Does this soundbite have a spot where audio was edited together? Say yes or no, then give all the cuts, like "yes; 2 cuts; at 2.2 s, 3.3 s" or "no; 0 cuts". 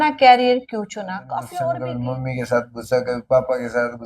yes; 1 cut; at 1.9 s